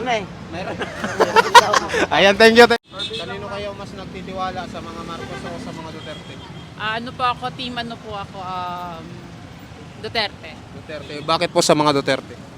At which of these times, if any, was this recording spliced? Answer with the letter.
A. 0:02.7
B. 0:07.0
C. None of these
A